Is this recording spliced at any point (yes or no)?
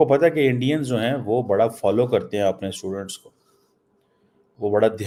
no